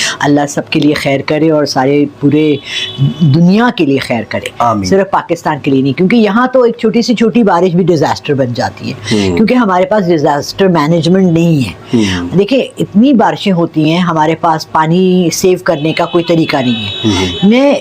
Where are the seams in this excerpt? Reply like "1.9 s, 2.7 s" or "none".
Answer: none